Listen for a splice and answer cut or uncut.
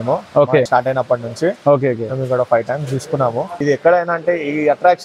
cut